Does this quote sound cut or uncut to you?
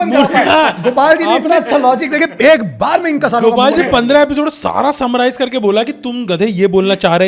uncut